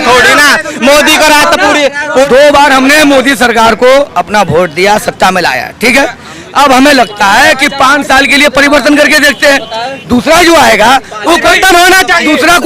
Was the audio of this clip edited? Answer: yes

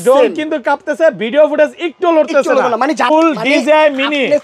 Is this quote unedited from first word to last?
no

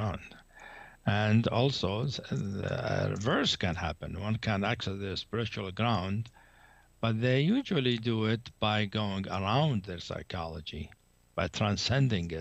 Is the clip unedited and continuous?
yes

